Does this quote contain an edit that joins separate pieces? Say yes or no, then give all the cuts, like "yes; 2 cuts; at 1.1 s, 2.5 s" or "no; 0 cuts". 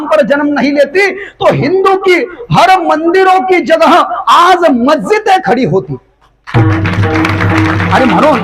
no; 0 cuts